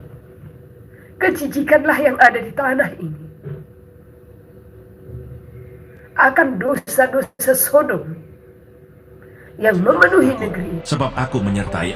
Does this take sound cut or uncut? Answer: cut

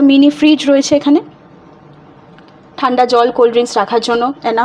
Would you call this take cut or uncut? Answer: uncut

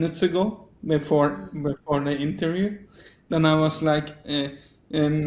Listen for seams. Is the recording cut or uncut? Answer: uncut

